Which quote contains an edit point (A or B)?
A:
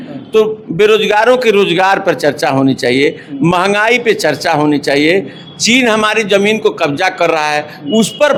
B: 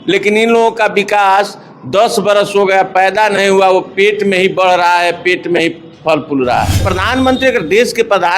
B